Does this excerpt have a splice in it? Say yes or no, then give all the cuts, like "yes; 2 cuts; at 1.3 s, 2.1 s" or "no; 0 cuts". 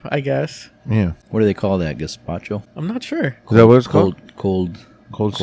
yes; 2 cuts; at 1.2 s, 2.7 s